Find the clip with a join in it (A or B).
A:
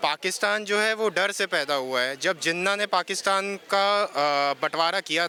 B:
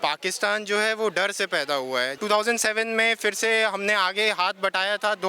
B